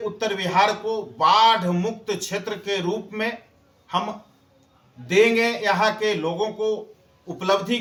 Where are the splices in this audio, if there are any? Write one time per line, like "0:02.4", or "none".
none